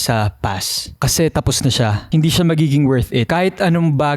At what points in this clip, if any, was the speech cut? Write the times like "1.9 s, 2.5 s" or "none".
2.0 s, 3.2 s